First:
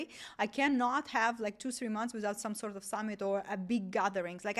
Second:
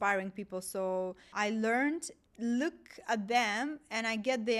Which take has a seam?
second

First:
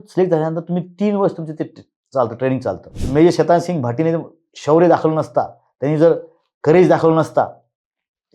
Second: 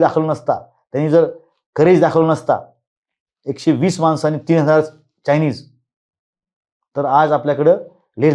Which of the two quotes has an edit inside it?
first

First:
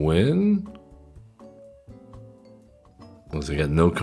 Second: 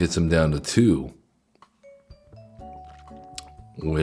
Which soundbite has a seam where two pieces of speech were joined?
first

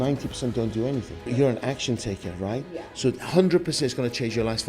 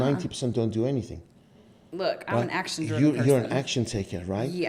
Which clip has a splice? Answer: first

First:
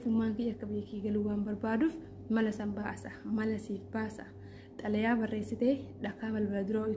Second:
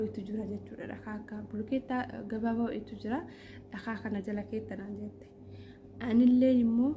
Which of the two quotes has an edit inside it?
first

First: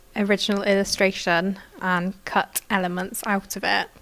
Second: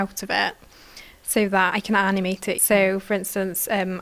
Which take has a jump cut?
first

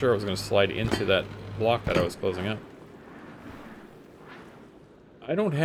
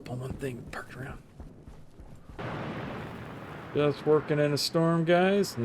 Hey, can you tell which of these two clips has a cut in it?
second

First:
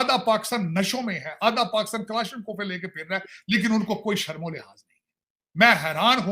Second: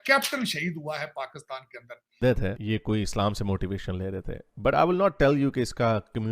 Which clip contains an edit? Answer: second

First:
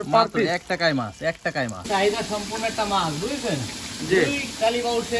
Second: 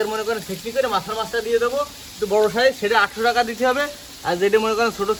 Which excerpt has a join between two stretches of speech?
first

